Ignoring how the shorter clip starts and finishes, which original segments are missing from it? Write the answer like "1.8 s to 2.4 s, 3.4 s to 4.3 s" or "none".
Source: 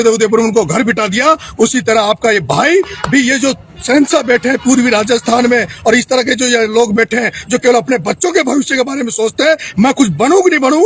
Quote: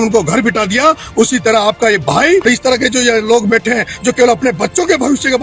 2.9 s to 5.9 s

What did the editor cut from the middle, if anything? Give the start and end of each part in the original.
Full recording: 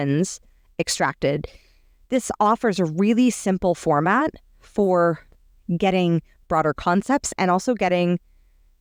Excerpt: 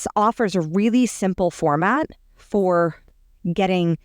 none

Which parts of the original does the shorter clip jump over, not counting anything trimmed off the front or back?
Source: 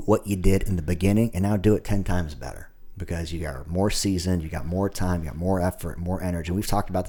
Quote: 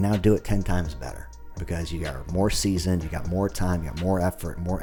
none

